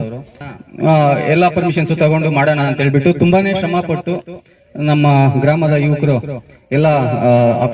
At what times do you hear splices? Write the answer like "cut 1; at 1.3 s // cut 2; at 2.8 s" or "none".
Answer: none